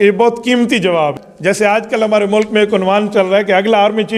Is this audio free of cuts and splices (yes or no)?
no